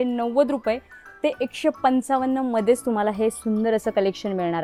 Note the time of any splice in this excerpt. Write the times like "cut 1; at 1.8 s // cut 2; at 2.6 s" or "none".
none